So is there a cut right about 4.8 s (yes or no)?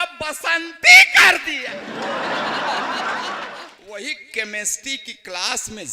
no